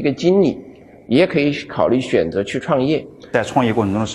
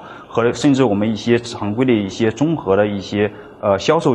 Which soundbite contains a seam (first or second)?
first